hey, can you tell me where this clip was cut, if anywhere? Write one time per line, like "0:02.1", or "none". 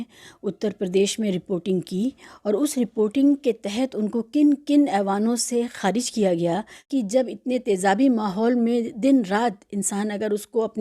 0:06.9